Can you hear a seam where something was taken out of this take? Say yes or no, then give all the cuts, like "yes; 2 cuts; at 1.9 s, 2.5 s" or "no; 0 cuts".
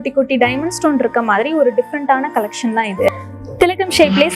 yes; 1 cut; at 3.1 s